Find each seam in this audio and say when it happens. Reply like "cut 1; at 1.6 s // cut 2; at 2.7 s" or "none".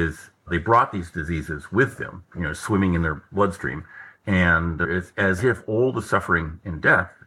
none